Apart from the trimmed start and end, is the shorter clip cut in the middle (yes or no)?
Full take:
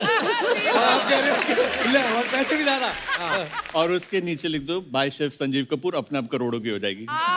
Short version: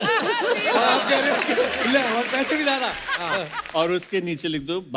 no